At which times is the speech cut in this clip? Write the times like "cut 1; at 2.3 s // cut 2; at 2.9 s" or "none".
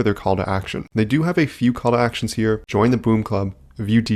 none